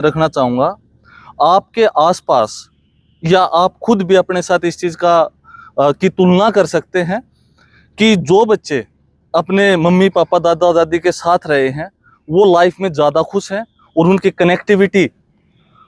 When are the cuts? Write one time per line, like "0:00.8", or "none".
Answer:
none